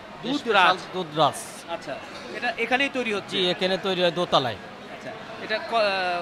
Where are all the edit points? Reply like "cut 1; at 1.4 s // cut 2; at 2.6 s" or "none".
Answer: none